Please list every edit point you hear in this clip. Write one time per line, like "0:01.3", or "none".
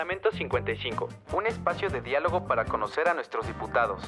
none